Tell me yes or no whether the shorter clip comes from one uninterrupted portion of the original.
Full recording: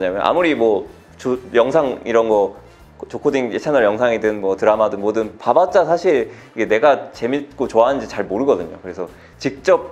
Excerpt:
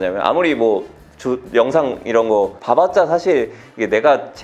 no